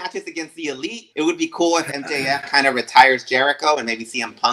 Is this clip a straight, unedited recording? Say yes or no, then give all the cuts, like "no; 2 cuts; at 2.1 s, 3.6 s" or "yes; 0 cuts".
no; 1 cut; at 1.0 s